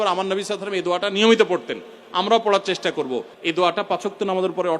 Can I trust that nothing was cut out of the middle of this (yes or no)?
no